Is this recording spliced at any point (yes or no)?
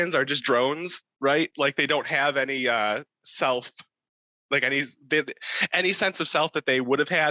no